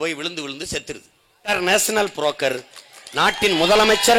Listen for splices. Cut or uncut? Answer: cut